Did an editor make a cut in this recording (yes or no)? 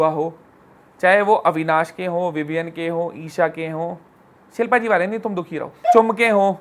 no